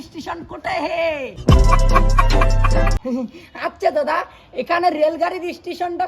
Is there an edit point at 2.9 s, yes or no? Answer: yes